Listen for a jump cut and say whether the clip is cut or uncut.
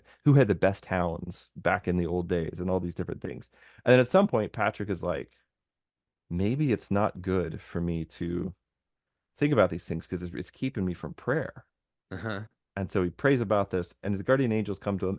uncut